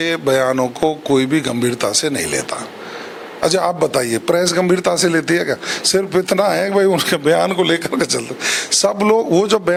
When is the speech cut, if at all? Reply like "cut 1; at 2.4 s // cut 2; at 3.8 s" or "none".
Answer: none